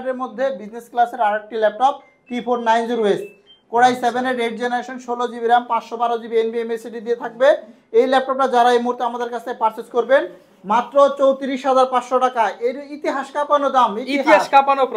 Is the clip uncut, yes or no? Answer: yes